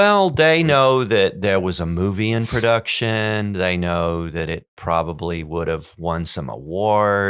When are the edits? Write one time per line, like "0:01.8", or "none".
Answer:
none